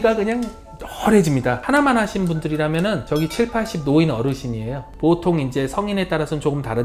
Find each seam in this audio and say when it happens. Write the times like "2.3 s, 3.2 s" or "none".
1.6 s, 4.9 s